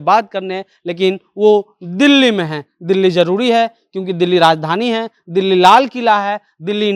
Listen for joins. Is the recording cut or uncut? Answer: uncut